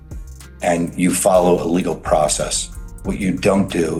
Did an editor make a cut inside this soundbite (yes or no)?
no